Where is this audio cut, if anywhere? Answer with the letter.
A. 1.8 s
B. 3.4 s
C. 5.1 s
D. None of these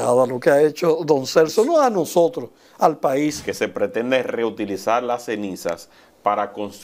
B